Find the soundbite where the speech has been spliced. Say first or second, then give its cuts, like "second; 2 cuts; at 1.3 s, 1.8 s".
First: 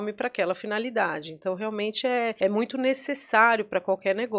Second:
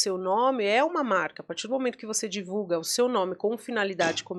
first; 1 cut; at 2.3 s